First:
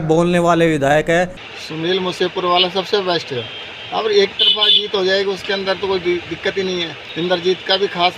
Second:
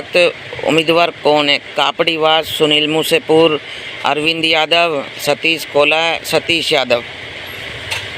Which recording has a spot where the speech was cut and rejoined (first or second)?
first